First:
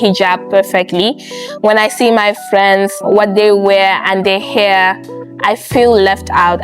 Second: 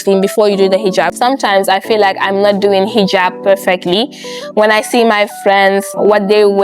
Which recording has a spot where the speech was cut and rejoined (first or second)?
second